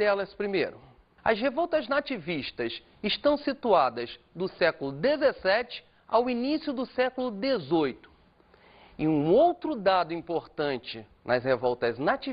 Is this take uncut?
no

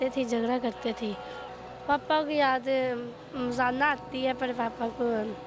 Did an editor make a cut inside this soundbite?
yes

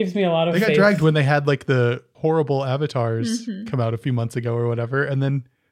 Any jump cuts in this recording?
yes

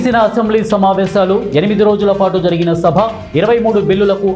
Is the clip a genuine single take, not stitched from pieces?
yes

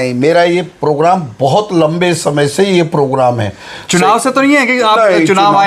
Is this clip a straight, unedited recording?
yes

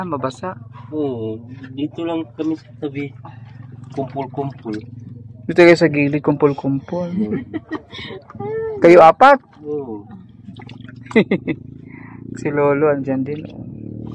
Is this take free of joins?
yes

